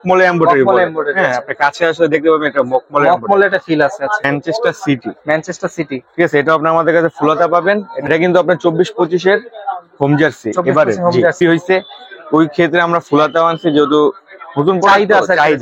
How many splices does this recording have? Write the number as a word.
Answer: three